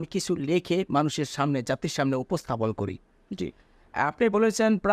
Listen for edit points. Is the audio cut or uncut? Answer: uncut